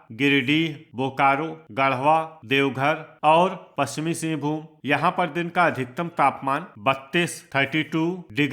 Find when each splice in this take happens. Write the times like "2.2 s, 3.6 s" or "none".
1.6 s, 3.6 s, 4.7 s

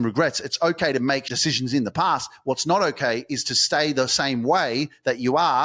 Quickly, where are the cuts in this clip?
1.3 s

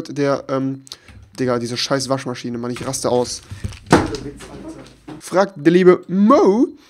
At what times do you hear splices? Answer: 5.1 s

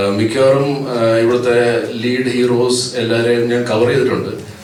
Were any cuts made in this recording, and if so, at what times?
none

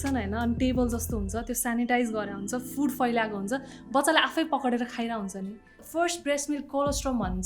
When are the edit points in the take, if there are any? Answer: 5.8 s

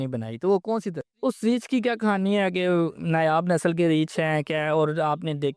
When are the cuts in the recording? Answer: 1.2 s

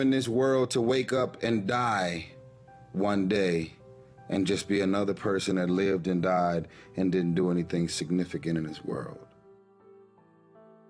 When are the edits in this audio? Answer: 9.2 s

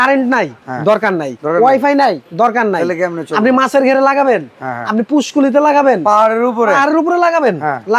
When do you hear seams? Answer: 0.9 s, 2.2 s

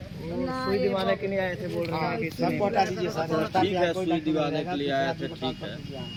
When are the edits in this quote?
none

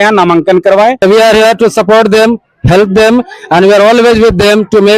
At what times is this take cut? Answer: 1.0 s

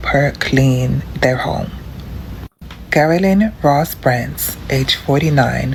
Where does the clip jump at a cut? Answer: none

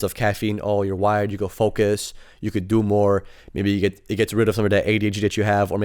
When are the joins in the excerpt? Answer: none

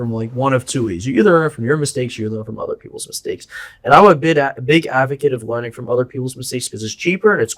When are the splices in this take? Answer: none

